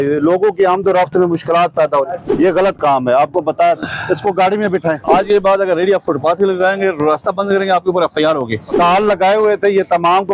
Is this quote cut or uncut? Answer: cut